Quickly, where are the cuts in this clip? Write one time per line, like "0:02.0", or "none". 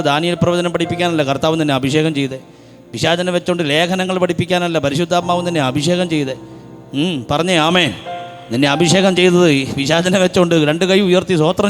none